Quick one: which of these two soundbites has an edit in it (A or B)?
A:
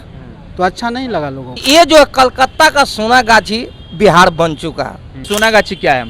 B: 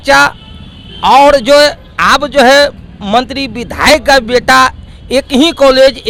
A